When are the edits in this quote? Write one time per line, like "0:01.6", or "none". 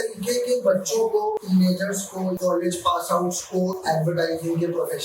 0:01.4
0:02.4